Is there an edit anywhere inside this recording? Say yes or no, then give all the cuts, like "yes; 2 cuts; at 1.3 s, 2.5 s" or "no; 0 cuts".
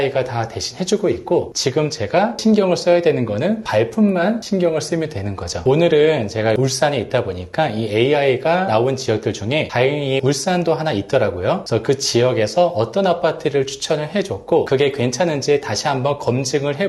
no; 0 cuts